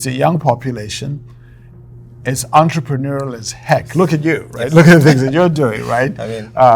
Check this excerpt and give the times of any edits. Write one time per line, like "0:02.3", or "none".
none